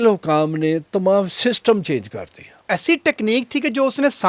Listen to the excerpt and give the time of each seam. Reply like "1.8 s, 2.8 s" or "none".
2.5 s